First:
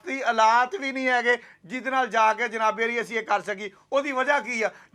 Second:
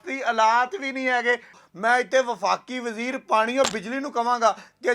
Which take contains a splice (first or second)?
second